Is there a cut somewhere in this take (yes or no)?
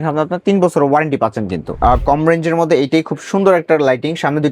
yes